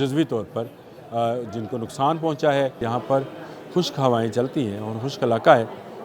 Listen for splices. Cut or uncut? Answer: cut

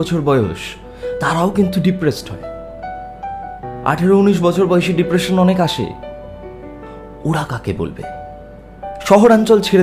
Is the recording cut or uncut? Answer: uncut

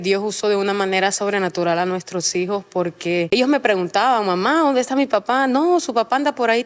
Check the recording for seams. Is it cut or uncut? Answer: cut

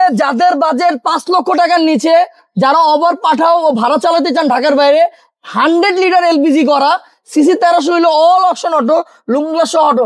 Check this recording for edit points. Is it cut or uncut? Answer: uncut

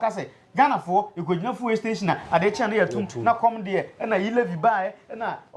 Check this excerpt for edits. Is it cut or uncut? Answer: uncut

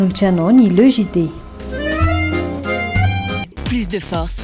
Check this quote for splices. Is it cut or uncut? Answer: cut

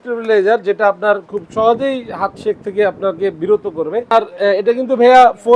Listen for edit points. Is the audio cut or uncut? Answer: cut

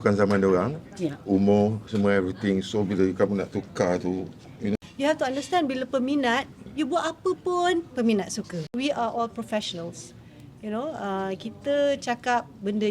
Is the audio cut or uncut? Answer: cut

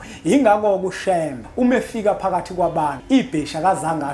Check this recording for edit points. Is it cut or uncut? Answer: cut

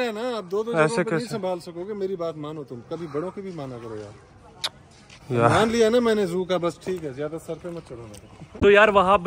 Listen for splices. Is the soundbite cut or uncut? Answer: uncut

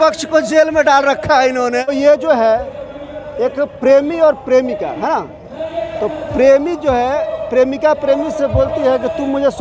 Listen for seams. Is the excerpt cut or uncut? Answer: cut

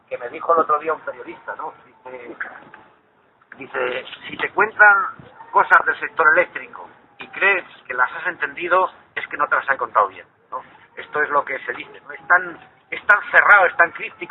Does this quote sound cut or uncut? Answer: cut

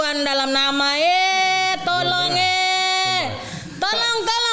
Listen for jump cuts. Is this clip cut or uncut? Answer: uncut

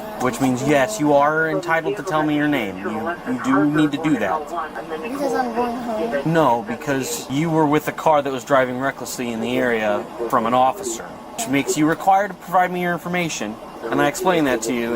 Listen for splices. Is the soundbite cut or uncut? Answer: cut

